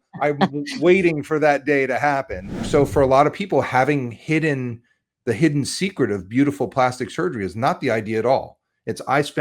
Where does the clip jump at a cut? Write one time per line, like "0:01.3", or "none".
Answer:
0:02.6